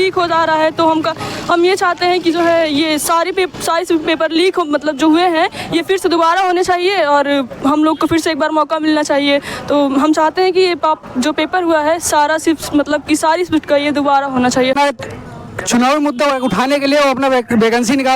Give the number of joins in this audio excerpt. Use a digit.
1